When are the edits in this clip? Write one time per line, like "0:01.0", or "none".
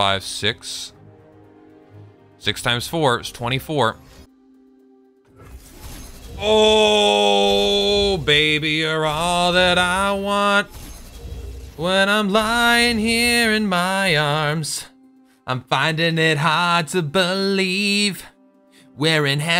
0:04.3